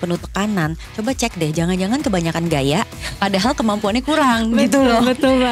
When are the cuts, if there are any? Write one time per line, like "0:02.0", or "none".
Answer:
none